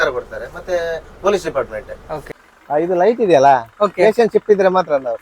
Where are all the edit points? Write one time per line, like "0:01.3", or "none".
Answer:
0:02.2